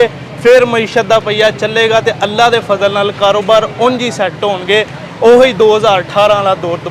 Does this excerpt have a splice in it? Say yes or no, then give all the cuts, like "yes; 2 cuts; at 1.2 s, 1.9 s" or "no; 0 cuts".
no; 0 cuts